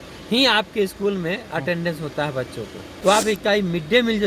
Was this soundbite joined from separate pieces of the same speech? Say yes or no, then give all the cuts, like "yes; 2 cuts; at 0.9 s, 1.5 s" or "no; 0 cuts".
yes; 1 cut; at 2.9 s